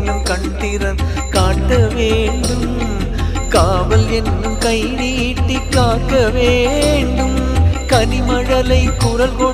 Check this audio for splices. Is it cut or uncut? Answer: uncut